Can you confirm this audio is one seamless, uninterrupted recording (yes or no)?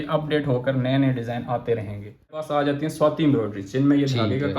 no